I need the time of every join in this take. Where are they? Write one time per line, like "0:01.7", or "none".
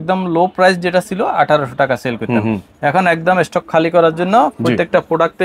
none